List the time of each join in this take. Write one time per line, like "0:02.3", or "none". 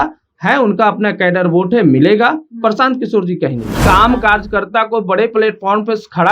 0:03.8